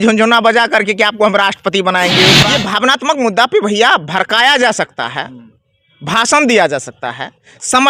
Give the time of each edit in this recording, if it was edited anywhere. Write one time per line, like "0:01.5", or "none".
0:02.4